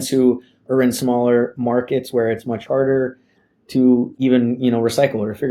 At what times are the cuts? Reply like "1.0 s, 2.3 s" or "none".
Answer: 4.1 s